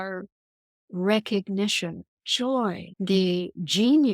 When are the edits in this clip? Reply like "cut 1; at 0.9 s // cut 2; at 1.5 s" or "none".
cut 1; at 2.9 s